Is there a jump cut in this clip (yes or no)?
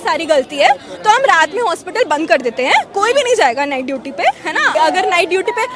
yes